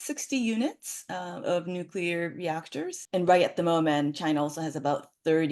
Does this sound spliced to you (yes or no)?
no